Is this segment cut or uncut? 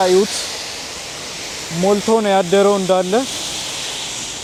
uncut